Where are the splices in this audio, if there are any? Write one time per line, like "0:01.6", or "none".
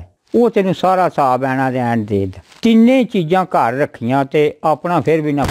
0:02.4